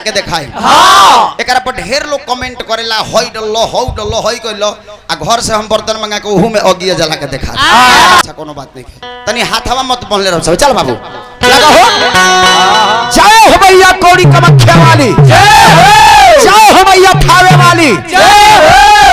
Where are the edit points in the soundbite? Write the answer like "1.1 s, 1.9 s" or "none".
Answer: 8.2 s